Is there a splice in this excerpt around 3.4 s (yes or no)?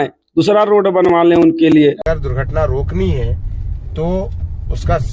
no